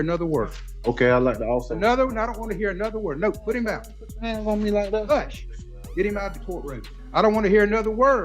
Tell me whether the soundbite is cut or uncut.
cut